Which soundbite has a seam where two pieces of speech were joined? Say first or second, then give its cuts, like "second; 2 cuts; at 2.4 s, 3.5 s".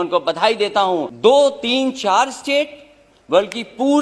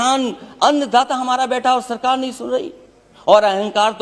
first; 1 cut; at 1.1 s